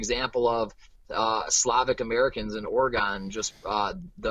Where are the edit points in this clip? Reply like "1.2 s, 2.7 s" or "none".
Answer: none